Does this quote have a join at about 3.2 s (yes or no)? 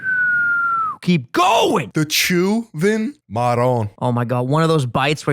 yes